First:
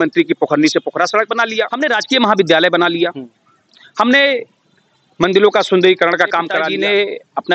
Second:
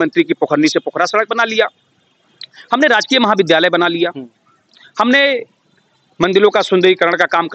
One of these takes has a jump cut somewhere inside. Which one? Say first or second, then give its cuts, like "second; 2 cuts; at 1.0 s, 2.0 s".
first; 2 cuts; at 1.7 s, 6.7 s